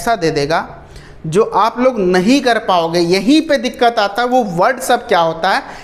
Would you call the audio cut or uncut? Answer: uncut